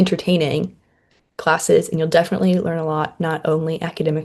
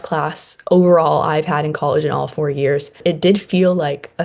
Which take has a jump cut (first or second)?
second